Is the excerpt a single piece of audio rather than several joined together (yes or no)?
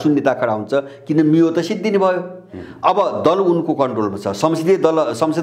yes